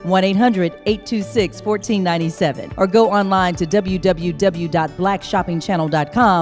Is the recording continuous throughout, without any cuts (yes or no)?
no